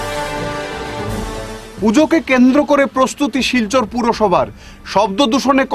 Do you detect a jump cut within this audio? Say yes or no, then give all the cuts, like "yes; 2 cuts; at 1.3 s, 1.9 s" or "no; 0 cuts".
yes; 1 cut; at 1.1 s